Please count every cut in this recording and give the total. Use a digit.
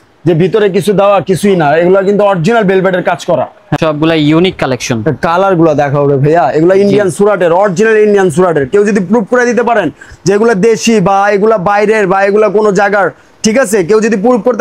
1